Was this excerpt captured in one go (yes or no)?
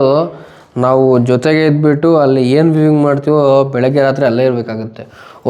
yes